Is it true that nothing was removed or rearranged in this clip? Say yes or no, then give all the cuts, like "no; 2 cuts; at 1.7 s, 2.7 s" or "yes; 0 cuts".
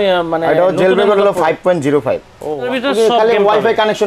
no; 1 cut; at 2.7 s